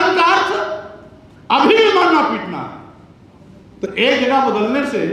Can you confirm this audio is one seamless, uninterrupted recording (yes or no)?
yes